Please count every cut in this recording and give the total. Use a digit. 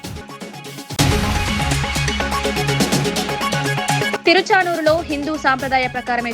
2